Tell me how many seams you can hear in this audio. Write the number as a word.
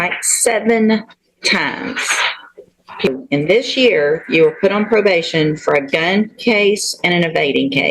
one